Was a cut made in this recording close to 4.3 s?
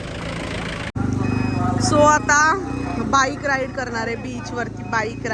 no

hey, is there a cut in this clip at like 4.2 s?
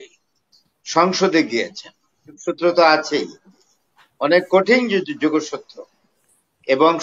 no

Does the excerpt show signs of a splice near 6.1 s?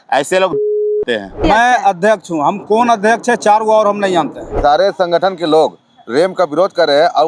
no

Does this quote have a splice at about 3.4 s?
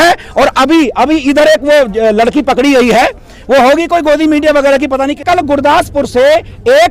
no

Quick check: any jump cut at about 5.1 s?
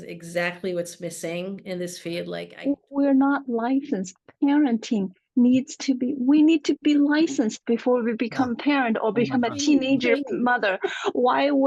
no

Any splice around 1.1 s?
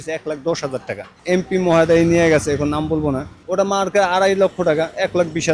yes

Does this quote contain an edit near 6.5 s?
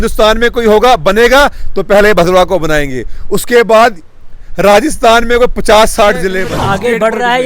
yes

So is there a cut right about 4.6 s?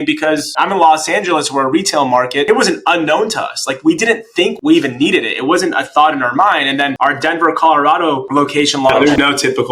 yes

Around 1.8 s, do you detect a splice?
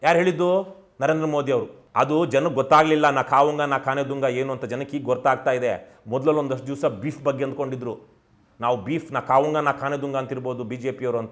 yes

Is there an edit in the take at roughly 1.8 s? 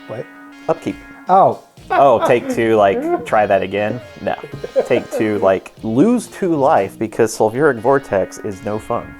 yes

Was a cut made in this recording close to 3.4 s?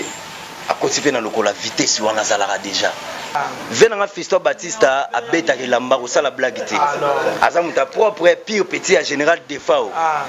yes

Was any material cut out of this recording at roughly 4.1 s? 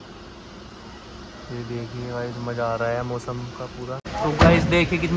yes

